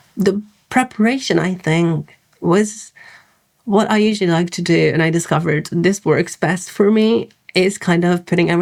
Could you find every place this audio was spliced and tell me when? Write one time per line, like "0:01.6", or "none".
none